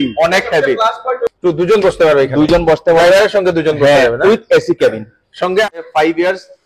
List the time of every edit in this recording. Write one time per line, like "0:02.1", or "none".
0:01.3
0:05.8